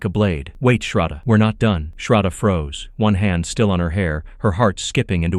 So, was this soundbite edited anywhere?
no; 0 cuts

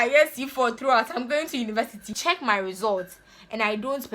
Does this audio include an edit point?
yes; 1 cut; at 2.1 s

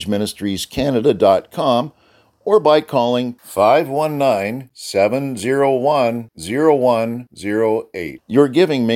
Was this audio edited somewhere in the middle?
no; 0 cuts

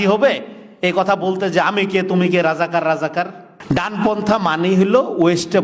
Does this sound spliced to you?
yes; 1 cut; at 3.5 s

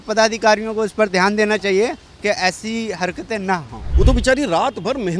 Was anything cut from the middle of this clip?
yes; 1 cut; at 3.8 s

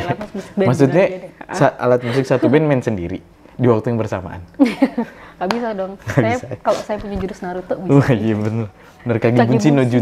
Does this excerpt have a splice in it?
no; 0 cuts

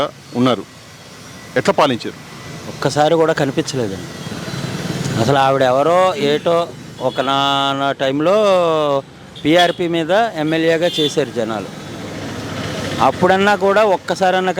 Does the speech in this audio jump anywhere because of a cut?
no; 0 cuts

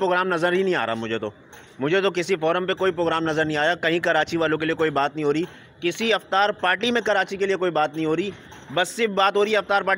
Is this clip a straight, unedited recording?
yes; 0 cuts

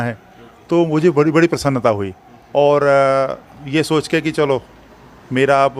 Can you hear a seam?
no; 0 cuts

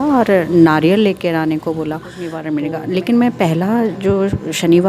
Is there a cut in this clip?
yes; 1 cut; at 2.4 s

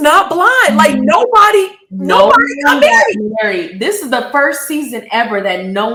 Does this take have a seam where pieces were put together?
no; 0 cuts

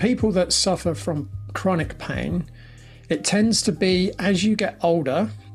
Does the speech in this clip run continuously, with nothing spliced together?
yes; 0 cuts

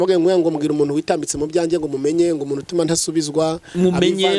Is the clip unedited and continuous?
yes; 0 cuts

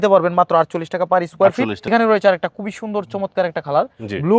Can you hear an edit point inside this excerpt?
yes; 1 cut; at 1.9 s

